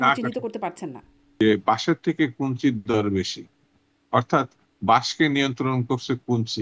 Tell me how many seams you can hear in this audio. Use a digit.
1